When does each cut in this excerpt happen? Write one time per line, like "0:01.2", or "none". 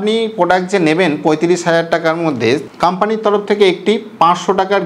0:02.7